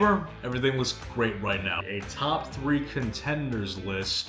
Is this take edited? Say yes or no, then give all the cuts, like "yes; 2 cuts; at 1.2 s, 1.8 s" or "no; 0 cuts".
yes; 1 cut; at 1.8 s